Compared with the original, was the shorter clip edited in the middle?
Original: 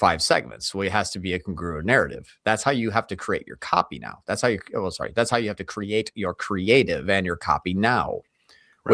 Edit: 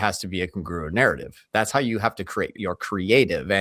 yes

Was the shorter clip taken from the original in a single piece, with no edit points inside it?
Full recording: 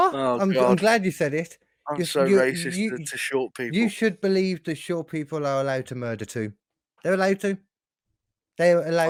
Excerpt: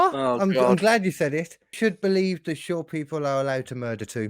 no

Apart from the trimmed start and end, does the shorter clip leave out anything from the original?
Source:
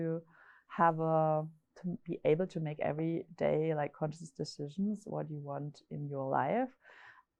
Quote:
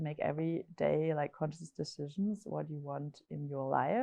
no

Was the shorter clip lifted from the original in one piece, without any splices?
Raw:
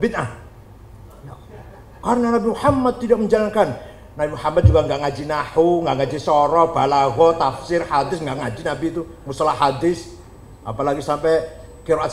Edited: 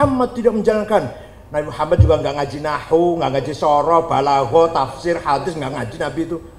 yes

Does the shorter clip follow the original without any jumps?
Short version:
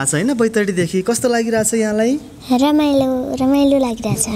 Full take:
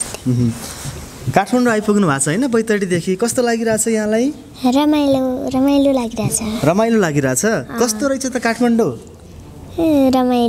yes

